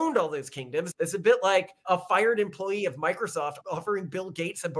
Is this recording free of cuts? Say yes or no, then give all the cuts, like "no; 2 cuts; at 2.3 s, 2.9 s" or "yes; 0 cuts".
no; 3 cuts; at 0.9 s, 1.8 s, 3.6 s